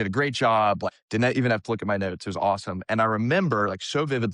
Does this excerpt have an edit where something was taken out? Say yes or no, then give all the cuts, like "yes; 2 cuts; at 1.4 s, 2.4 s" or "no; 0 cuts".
yes; 1 cut; at 1.0 s